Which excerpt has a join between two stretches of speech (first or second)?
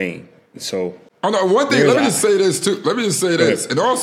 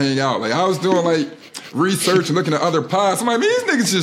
first